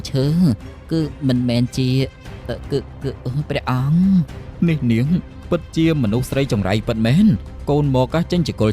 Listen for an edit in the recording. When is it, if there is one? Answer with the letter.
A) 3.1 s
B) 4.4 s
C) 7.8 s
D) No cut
B